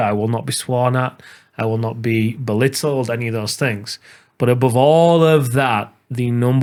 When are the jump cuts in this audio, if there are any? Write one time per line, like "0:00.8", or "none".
none